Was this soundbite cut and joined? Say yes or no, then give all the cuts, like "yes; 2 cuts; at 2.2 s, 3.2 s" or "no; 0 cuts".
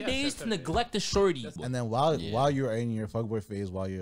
yes; 1 cut; at 1.6 s